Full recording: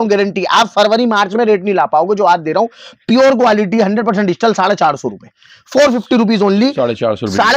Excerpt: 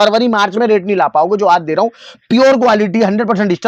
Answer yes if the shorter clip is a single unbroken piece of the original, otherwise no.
yes